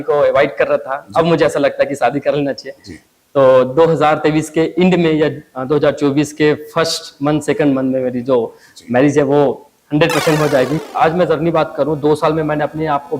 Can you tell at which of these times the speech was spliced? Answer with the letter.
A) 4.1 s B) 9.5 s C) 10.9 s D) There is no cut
C